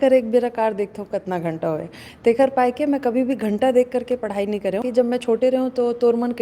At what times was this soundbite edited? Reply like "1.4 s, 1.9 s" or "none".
4.8 s